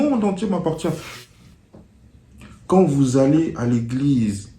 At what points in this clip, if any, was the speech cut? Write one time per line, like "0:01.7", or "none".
0:01.1